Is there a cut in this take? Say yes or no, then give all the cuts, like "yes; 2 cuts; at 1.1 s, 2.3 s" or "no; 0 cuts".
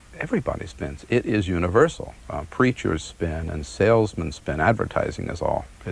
no; 0 cuts